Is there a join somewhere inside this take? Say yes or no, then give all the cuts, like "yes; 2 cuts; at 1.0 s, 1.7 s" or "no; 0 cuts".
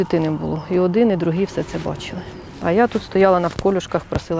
no; 0 cuts